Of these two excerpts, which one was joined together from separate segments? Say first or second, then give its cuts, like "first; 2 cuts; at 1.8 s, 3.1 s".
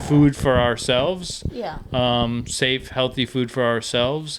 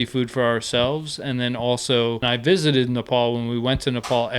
second; 1 cut; at 2.2 s